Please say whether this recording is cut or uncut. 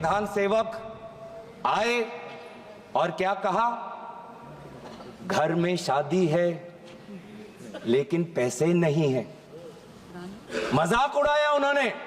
uncut